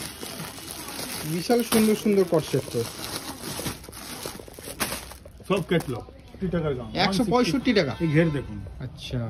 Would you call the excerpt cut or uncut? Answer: cut